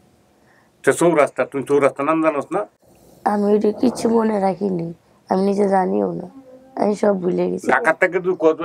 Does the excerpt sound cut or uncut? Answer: uncut